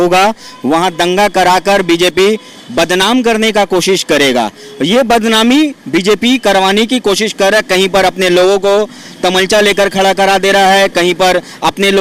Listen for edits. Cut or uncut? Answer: uncut